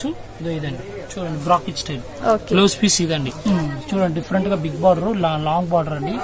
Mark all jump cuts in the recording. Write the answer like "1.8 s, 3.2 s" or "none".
3.4 s